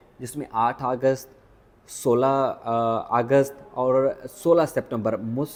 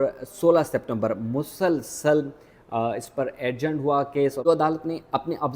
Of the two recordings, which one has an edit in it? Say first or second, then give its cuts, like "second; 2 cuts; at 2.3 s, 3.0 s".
second; 1 cut; at 4.5 s